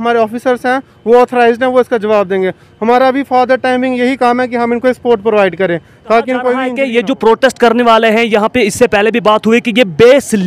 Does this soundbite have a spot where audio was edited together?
yes; 1 cut; at 6.7 s

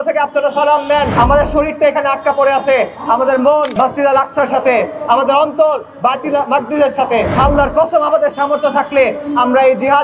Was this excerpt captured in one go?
no; 3 cuts; at 1.1 s, 3.7 s, 7.3 s

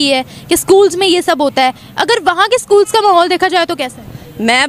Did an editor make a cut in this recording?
no; 0 cuts

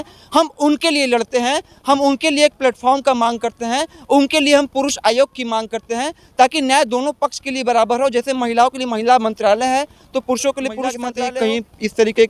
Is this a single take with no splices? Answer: no; 1 cut; at 11.0 s

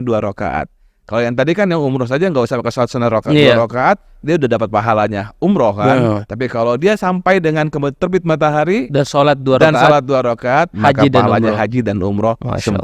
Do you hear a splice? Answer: no; 0 cuts

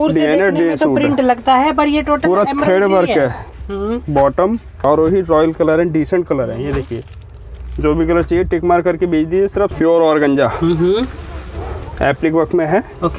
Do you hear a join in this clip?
yes; 2 cuts; at 4.8 s, 9.7 s

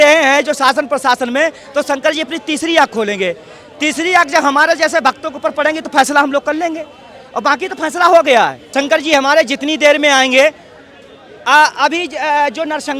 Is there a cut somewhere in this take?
yes; 1 cut; at 8.6 s

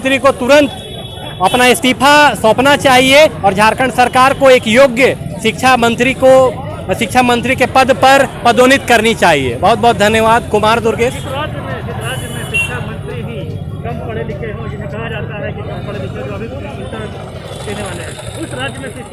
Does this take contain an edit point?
no; 0 cuts

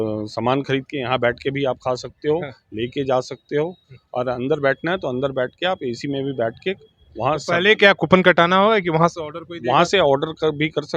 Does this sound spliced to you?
no; 0 cuts

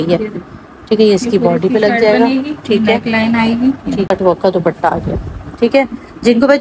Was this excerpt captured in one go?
no; 1 cut; at 4.1 s

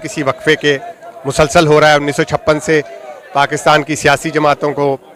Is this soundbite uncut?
yes; 0 cuts

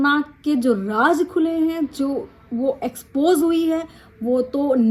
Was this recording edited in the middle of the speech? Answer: no; 0 cuts

